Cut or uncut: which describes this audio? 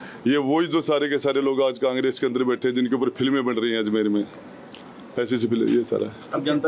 uncut